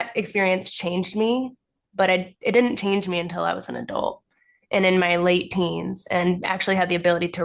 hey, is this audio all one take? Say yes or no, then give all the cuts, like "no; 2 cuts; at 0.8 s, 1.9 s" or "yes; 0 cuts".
yes; 0 cuts